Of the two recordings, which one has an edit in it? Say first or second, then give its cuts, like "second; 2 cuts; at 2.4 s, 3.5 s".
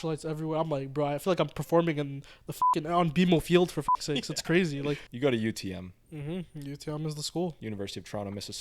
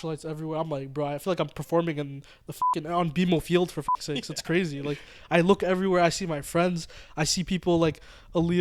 first; 2 cuts; at 5.1 s, 7.6 s